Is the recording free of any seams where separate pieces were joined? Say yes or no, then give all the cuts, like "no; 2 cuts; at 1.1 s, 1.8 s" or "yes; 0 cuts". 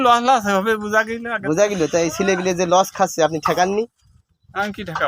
yes; 0 cuts